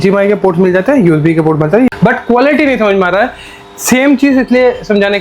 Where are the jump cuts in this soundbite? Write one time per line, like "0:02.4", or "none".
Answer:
0:01.9